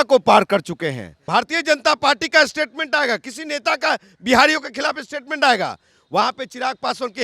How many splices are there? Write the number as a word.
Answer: one